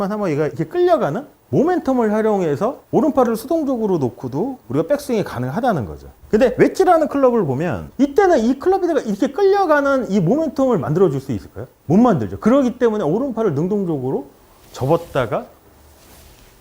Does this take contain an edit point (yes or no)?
yes